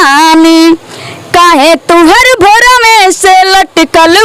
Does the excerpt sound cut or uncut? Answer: uncut